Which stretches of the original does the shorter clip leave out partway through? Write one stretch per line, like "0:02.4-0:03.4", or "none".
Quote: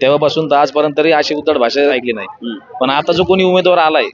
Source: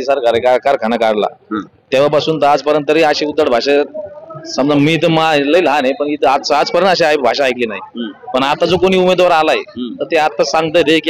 0:03.9-0:07.5